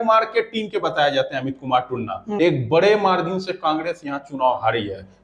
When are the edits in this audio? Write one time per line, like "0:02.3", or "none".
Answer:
0:02.3